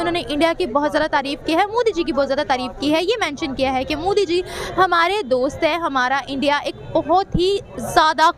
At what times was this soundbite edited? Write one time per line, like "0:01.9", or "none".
none